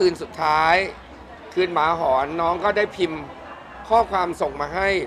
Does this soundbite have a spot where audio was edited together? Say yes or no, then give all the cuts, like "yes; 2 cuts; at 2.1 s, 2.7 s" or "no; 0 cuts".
no; 0 cuts